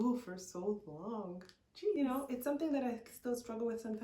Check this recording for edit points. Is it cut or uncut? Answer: cut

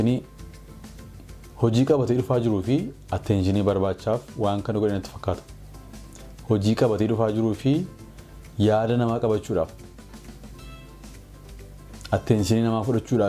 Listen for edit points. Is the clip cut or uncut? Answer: uncut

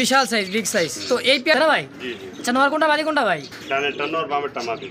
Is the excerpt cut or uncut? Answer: cut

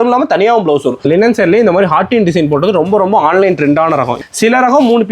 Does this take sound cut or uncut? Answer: cut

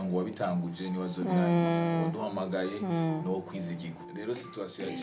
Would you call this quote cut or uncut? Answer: cut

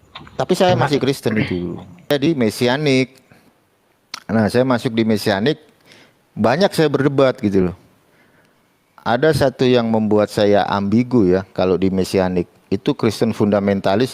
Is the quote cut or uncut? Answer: cut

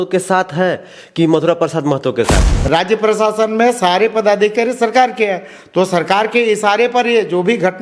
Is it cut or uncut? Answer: cut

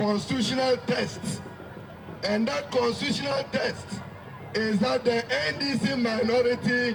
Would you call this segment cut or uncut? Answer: uncut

